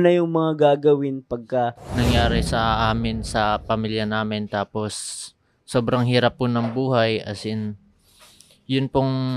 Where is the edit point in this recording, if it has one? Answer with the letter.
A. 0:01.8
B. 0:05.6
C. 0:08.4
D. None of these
A